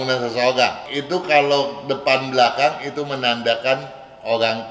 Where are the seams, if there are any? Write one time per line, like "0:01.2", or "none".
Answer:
0:00.9